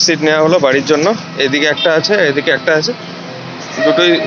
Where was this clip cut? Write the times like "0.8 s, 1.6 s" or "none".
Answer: none